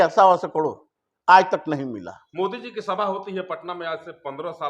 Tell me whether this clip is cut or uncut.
uncut